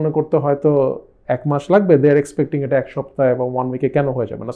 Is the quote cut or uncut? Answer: uncut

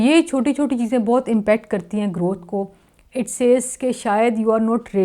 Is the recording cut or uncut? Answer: uncut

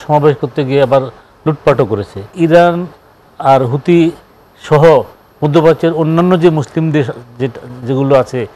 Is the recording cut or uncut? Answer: cut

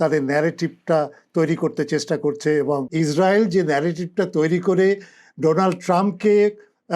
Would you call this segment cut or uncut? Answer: cut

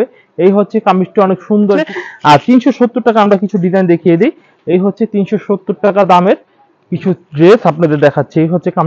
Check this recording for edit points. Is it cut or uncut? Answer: cut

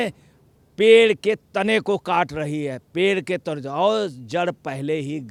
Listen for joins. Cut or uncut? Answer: uncut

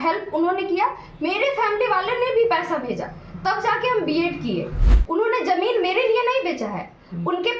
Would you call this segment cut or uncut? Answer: cut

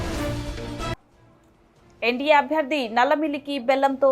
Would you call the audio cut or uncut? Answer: cut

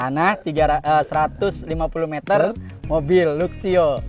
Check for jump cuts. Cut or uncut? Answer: uncut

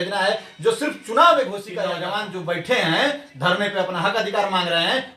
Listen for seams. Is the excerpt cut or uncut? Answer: cut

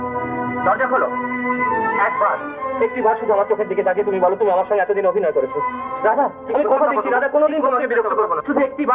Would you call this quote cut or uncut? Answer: uncut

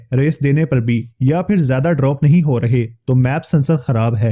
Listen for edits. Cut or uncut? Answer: uncut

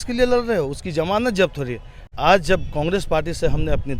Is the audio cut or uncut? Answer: cut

